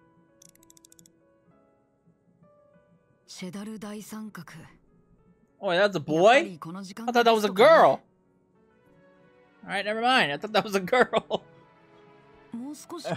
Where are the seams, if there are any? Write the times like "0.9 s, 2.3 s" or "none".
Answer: none